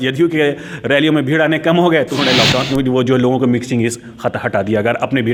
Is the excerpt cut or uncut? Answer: uncut